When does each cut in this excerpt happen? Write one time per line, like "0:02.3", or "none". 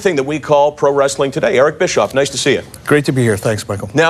0:01.3